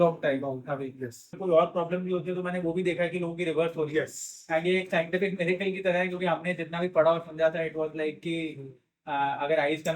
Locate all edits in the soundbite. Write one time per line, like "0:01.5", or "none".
0:01.4